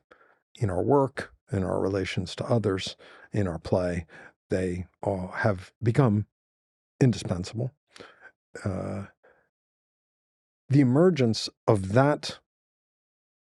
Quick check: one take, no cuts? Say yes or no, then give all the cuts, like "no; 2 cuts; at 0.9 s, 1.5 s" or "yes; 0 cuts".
yes; 0 cuts